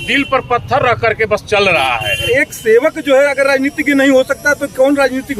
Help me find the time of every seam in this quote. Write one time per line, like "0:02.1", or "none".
0:02.3